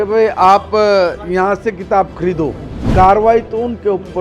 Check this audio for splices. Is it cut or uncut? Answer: cut